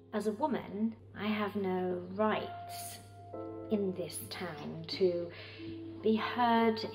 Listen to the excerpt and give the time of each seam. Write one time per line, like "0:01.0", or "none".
0:01.1